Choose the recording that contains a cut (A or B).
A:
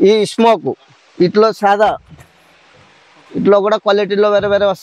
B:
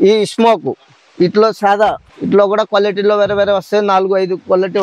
B